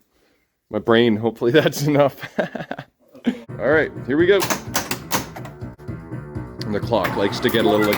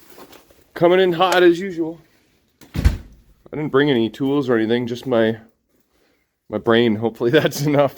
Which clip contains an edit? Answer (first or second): first